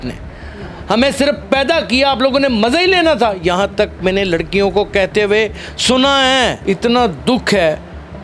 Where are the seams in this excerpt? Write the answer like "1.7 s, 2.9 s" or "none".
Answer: 6.6 s